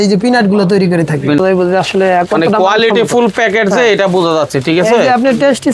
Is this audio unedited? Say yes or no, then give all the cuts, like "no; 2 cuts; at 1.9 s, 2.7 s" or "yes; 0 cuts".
no; 1 cut; at 1.4 s